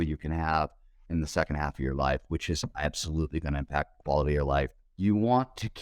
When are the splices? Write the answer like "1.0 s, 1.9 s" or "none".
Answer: 1.0 s, 4.8 s